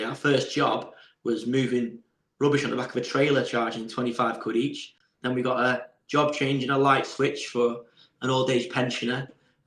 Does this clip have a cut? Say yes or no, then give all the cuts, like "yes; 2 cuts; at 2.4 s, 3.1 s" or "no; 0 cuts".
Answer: no; 0 cuts